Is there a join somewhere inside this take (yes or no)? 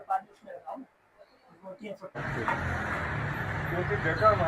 yes